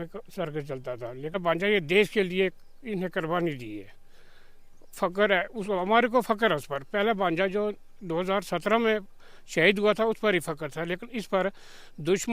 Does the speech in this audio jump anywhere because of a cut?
yes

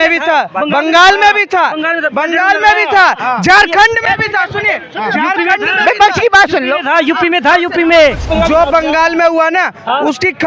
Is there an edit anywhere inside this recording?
yes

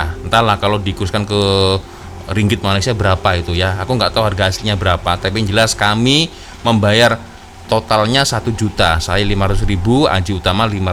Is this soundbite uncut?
yes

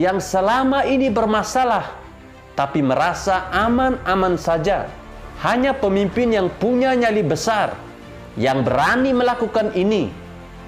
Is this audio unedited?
no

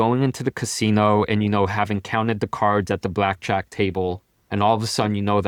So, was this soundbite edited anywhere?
no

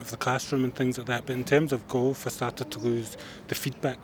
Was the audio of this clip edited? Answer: no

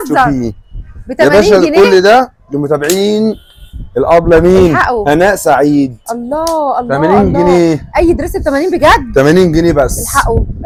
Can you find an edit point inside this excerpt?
no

